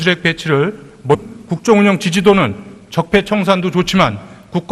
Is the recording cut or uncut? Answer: uncut